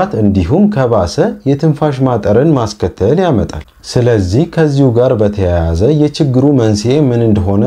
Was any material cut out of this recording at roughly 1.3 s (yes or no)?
no